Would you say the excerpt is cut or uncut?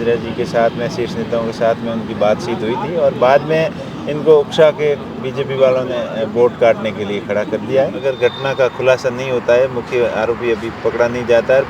cut